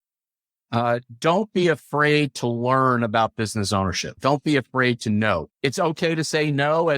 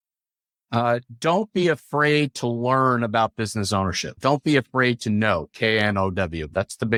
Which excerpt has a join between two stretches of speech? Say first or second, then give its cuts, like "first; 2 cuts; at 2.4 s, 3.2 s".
first; 1 cut; at 5.5 s